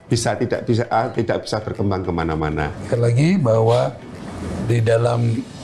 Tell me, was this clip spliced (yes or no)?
yes